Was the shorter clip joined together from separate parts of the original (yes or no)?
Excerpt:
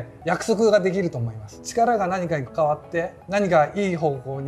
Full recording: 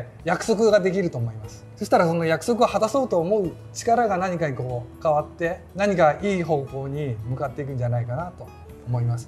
yes